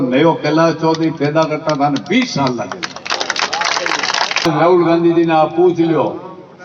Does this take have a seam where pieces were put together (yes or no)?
yes